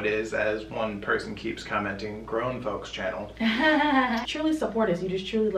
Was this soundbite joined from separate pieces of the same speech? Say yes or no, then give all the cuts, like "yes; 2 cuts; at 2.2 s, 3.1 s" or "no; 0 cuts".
yes; 1 cut; at 4.3 s